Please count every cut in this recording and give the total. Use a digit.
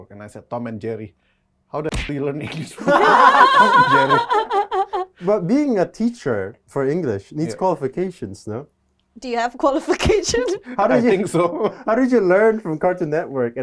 0